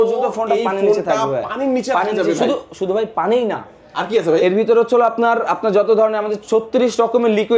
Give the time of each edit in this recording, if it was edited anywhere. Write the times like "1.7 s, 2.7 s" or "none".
none